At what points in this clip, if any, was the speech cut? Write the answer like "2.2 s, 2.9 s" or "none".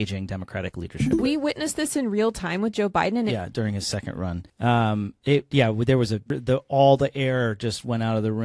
1.2 s, 3.3 s, 4.5 s, 6.3 s